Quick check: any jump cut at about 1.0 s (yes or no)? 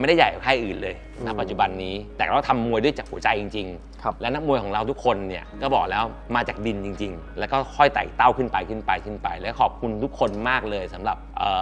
no